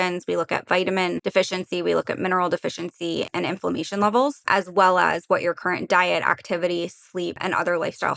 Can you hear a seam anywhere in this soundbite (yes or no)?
yes